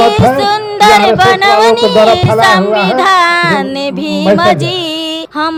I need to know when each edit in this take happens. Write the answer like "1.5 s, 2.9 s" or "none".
none